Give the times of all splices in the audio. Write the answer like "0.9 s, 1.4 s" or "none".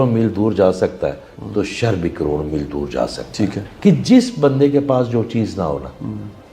3.7 s

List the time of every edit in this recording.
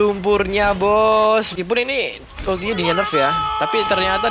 1.5 s

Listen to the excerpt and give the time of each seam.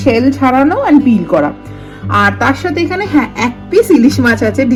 none

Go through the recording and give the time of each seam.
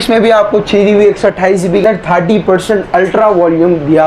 1.8 s

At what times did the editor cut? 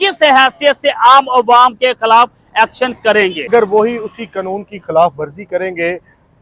3.5 s

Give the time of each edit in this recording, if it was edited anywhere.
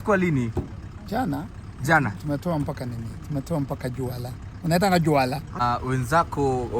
5.6 s

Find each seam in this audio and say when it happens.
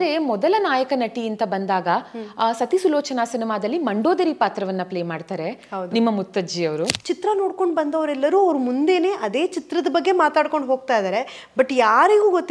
6.9 s

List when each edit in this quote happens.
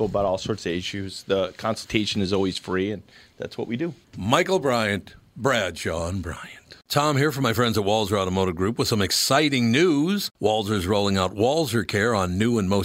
6.8 s

